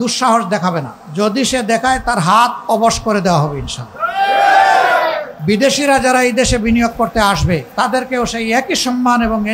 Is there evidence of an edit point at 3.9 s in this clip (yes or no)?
no